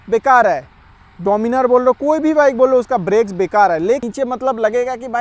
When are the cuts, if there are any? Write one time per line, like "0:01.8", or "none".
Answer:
0:04.0